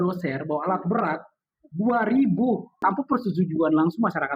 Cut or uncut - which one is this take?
cut